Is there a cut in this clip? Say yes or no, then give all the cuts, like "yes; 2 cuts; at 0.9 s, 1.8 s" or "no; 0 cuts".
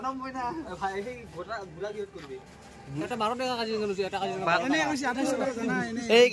yes; 1 cut; at 2.8 s